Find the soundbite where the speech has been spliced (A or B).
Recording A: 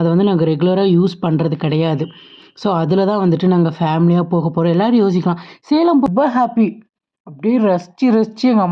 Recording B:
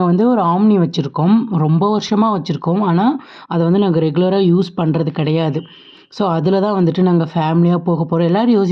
A